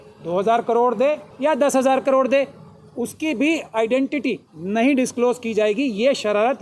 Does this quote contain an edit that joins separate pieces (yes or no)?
yes